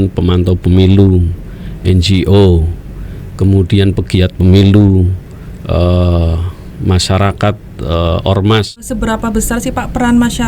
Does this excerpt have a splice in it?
yes; 1 cut; at 8.8 s

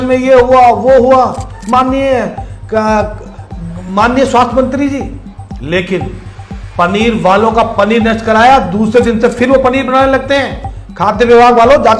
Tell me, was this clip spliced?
no; 0 cuts

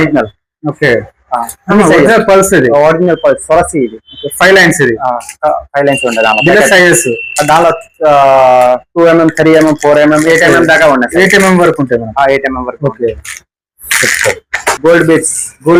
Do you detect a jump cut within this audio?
no; 0 cuts

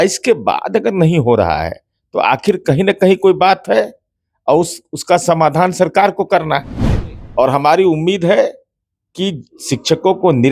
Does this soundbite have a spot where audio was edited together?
no; 0 cuts

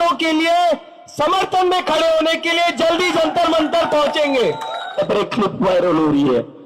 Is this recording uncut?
no; 1 cut; at 5.0 s

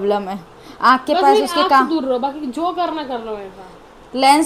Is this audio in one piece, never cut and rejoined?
yes; 0 cuts

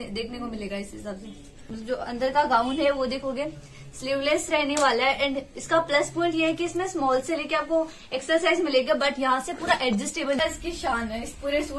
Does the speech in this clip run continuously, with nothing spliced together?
no; 2 cuts; at 1.7 s, 10.4 s

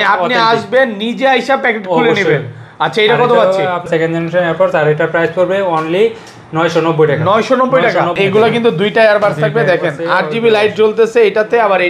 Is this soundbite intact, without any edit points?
no; 2 cuts; at 3.9 s, 8.1 s

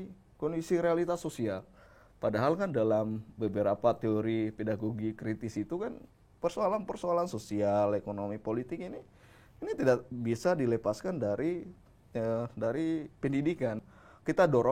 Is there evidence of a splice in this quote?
yes; 1 cut; at 13.8 s

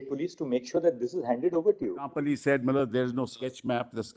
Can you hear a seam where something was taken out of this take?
yes; 1 cut; at 2.1 s

